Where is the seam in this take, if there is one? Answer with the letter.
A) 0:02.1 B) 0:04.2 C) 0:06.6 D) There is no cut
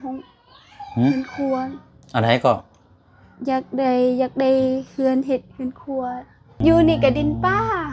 C